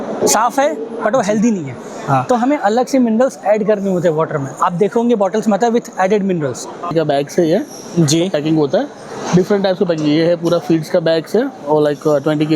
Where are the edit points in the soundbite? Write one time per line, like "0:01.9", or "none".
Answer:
0:06.9